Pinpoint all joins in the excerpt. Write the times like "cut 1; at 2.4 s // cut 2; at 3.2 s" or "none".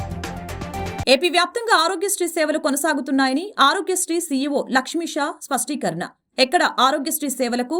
cut 1; at 0.9 s